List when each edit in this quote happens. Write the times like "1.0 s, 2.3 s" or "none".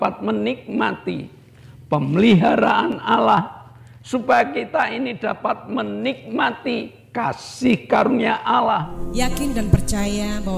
9.0 s